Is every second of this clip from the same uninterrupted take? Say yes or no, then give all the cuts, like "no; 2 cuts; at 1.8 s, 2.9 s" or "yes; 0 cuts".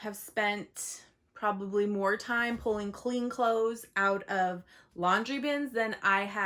yes; 0 cuts